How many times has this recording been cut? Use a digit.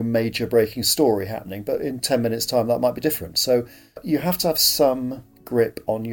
1